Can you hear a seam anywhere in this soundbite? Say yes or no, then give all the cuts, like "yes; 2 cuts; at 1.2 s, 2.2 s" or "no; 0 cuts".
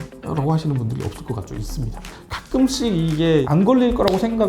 yes; 1 cut; at 2.2 s